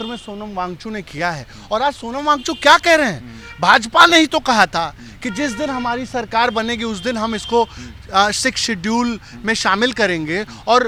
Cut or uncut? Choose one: uncut